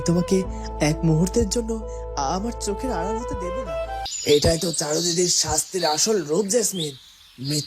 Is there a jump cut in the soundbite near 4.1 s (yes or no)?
yes